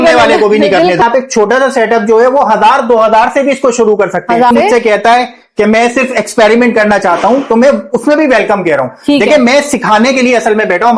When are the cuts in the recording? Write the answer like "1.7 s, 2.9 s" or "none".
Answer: 1.0 s, 4.5 s